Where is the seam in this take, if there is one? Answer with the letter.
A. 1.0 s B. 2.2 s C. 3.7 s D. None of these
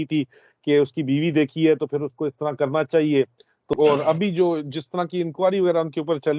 C